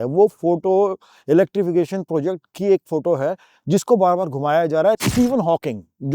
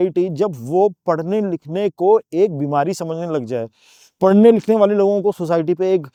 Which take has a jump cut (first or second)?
first